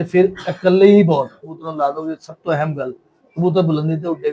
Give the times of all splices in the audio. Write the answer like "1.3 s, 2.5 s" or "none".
2.0 s